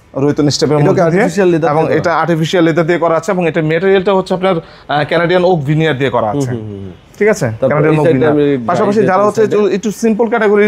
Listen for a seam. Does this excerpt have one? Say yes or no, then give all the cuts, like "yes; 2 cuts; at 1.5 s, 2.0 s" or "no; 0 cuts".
no; 0 cuts